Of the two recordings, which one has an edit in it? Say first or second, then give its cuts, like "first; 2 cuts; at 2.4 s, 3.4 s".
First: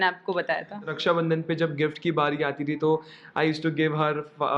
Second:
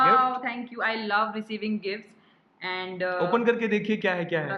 first; 1 cut; at 0.9 s